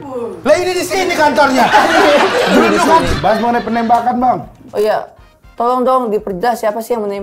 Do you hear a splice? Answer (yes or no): yes